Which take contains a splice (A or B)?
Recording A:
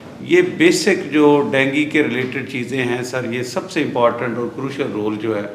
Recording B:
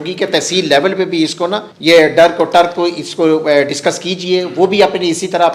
B